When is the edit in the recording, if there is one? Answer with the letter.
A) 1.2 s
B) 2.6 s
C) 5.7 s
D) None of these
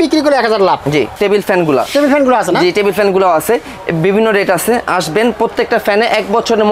A